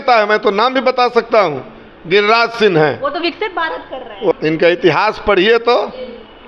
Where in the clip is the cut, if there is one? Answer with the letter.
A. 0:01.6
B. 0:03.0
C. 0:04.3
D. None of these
C